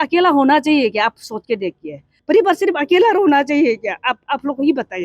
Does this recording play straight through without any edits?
no; 1 cut; at 2.1 s

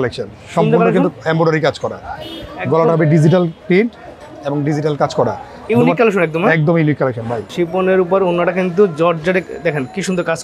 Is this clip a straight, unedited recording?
yes; 0 cuts

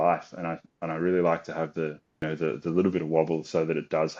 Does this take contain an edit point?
yes; 1 cut; at 2.2 s

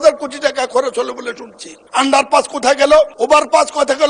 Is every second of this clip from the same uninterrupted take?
yes; 0 cuts

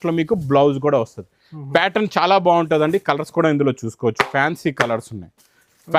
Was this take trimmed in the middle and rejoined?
no; 0 cuts

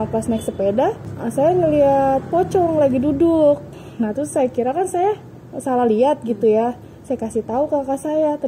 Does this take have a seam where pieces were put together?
no; 0 cuts

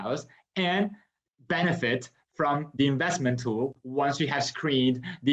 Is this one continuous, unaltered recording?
yes; 0 cuts

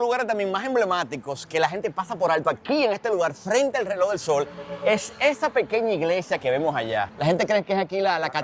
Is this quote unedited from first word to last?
yes; 0 cuts

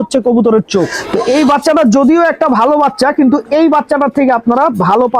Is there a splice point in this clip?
yes; 1 cut; at 1.0 s

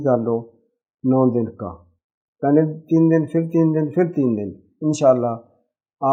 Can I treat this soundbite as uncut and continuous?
yes; 0 cuts

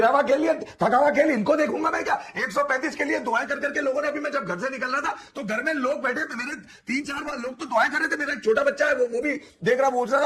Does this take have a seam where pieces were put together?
no; 0 cuts

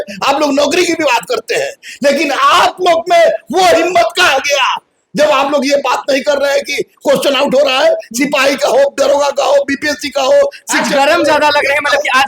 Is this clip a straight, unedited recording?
yes; 0 cuts

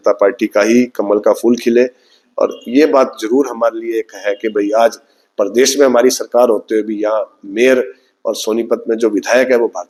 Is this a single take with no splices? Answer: yes; 0 cuts

